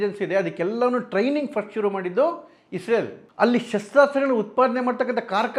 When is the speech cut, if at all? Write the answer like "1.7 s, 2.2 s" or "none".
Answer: none